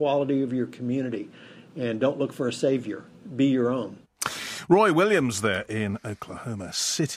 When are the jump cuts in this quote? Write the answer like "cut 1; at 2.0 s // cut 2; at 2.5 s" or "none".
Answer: none

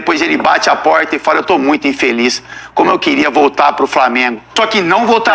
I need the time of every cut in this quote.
cut 1; at 4.4 s

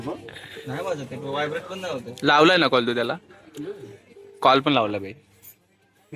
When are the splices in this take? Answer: none

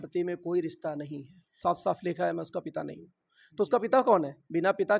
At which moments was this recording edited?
cut 1; at 1.6 s

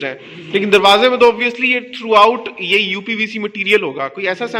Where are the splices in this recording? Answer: none

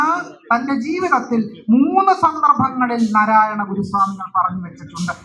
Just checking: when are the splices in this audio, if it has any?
none

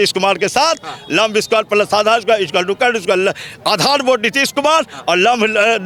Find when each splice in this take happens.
none

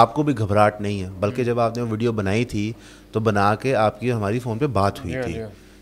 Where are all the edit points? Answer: none

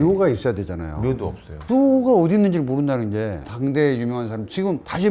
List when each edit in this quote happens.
cut 1; at 3.4 s

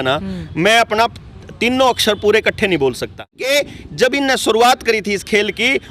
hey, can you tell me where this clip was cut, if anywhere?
cut 1; at 3.5 s

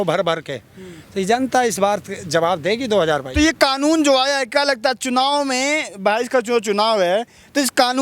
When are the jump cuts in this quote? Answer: none

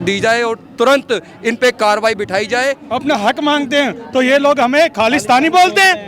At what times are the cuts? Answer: cut 1; at 2.8 s

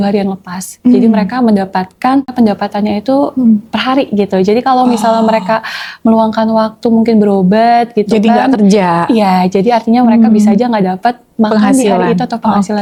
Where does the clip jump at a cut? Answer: none

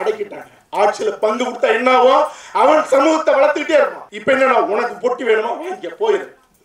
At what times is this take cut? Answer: cut 1; at 4.1 s

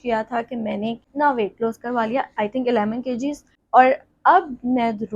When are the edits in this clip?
cut 1; at 1.1 s // cut 2; at 3.5 s

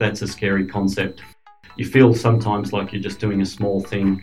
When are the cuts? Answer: cut 1; at 1.3 s

